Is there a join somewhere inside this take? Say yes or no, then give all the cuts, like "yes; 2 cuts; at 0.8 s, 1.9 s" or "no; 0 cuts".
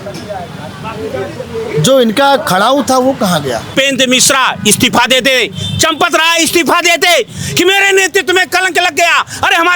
yes; 1 cut; at 3.7 s